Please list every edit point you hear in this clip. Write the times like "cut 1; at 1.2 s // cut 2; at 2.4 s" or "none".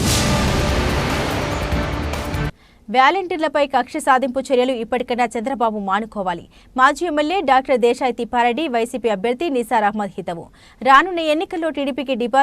cut 1; at 2.6 s